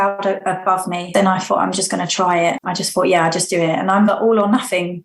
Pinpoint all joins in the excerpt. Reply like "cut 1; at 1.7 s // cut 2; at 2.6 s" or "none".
cut 1; at 1.1 s // cut 2; at 2.6 s